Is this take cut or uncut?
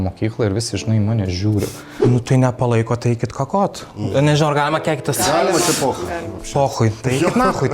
cut